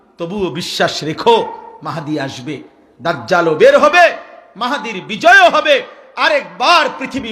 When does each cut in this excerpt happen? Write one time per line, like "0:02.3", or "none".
none